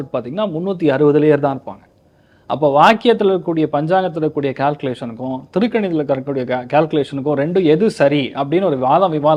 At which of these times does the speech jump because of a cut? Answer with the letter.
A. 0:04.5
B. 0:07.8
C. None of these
C